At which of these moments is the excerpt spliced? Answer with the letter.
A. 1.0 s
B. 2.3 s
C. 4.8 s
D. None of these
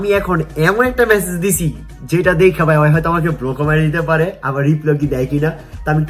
D